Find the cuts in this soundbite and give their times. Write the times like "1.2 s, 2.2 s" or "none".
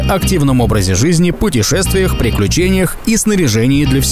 none